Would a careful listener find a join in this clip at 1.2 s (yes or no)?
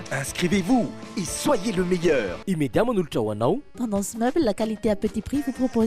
no